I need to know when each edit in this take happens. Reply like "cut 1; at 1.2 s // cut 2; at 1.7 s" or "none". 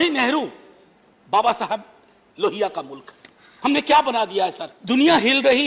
cut 1; at 4.7 s

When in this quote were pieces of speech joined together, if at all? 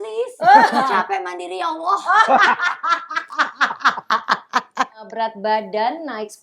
cut 1; at 5.1 s

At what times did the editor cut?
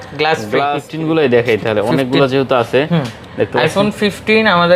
cut 1; at 0.9 s

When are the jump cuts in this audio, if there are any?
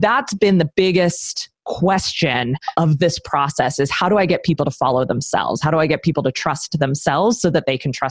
none

